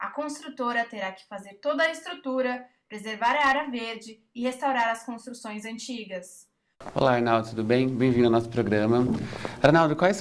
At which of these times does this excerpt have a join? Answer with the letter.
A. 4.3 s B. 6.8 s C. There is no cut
B